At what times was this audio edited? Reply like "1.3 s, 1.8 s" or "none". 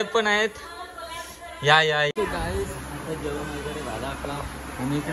2.1 s